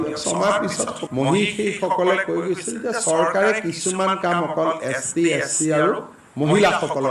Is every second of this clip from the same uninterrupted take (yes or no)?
no